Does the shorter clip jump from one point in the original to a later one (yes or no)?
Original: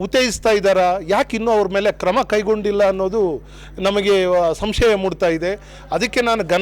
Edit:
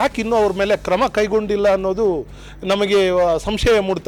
no